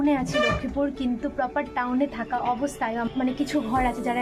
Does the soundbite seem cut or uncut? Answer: cut